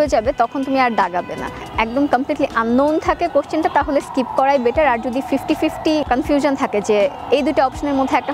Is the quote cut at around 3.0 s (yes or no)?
no